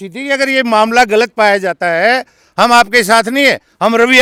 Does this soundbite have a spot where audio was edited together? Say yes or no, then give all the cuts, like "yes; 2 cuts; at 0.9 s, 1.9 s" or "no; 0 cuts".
no; 0 cuts